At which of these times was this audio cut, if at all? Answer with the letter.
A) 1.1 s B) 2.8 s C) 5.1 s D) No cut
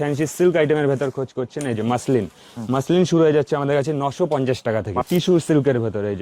C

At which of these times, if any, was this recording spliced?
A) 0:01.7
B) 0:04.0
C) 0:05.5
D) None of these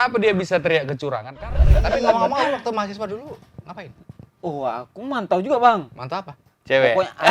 A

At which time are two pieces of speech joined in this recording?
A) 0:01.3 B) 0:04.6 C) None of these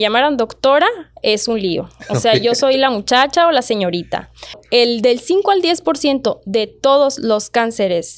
B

